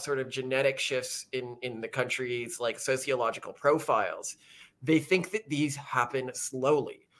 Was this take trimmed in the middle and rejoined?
no; 0 cuts

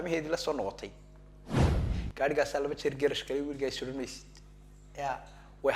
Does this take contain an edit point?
no; 0 cuts

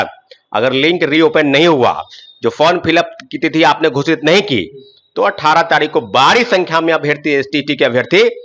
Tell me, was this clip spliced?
no; 0 cuts

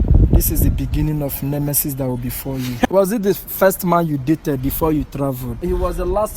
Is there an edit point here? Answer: yes; 2 cuts; at 2.9 s, 5.6 s

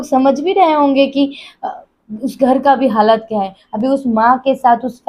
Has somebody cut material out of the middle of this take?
yes; 1 cut; at 3.6 s

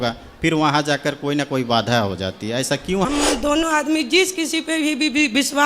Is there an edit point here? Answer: yes; 1 cut; at 3.1 s

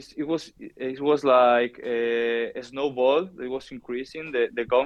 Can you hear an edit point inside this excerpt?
no; 0 cuts

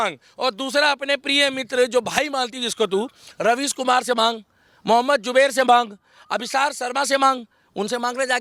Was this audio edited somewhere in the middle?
no; 0 cuts

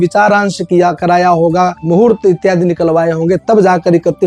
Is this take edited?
no; 0 cuts

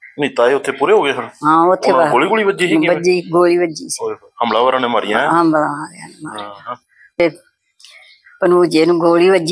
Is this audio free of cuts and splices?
no; 1 cut; at 7.2 s

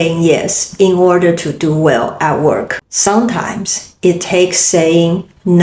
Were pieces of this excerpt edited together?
yes; 1 cut; at 2.8 s

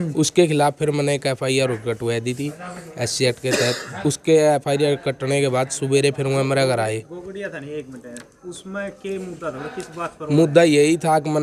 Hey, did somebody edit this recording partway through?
no; 0 cuts

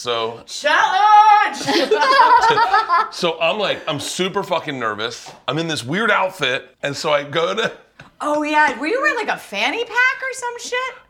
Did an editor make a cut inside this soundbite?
yes; 1 cut; at 6.7 s

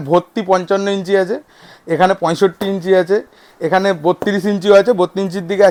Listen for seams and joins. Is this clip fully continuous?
yes; 0 cuts

